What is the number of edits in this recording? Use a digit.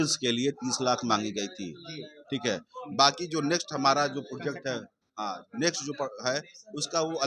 0